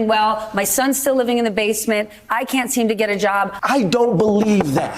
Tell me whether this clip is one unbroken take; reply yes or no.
no